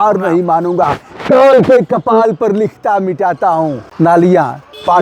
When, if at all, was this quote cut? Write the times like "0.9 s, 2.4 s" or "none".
3.8 s